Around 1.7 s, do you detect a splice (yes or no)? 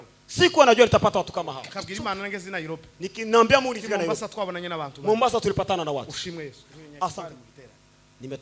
yes